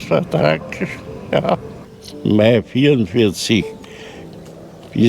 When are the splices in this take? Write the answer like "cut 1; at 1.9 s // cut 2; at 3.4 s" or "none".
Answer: cut 1; at 1.7 s

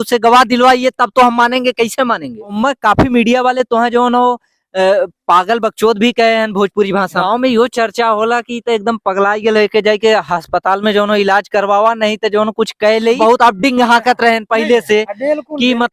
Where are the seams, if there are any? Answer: cut 1; at 2.4 s // cut 2; at 7.2 s // cut 3; at 13.2 s

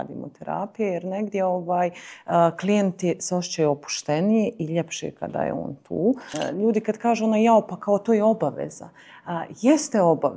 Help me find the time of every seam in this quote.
cut 1; at 6.3 s

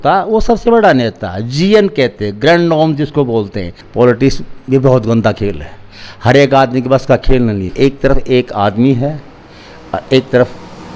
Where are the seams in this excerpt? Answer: cut 1; at 3.8 s // cut 2; at 7.7 s

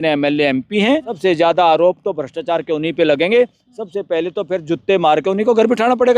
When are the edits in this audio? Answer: cut 1; at 1.1 s

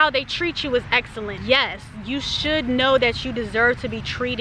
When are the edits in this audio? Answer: cut 1; at 1.4 s

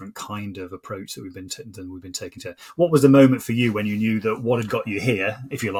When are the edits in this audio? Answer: none

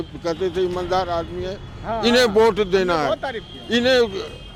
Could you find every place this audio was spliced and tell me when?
none

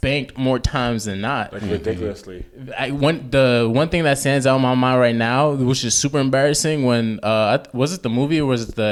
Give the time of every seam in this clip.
none

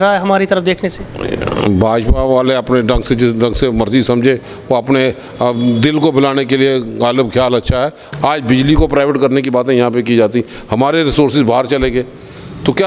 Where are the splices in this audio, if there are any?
cut 1; at 8.0 s

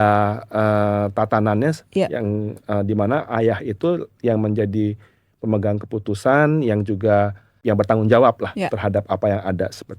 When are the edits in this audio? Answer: cut 1; at 7.5 s

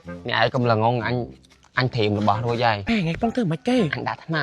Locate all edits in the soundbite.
cut 1; at 2.8 s

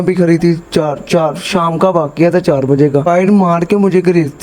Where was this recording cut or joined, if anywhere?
cut 1; at 3.0 s

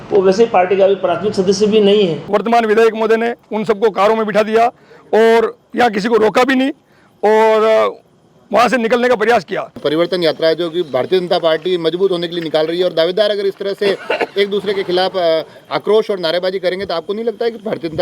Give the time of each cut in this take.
cut 1; at 2.2 s // cut 2; at 9.8 s

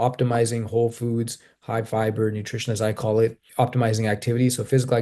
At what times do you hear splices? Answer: cut 1; at 3.4 s

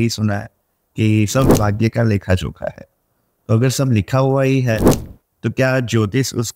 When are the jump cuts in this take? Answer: none

